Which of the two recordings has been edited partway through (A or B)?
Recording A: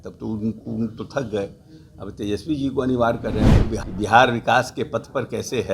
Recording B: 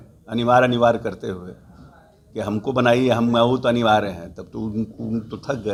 A